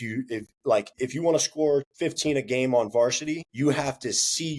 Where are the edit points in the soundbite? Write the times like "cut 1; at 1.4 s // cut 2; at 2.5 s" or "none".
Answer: cut 1; at 0.9 s // cut 2; at 1.9 s // cut 3; at 3.5 s